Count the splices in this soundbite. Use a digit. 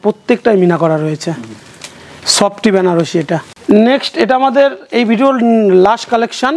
0